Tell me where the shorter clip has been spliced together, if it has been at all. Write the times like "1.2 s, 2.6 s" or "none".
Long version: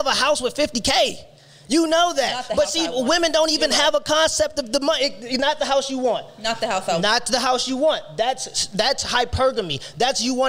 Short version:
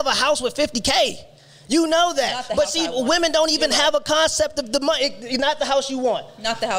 none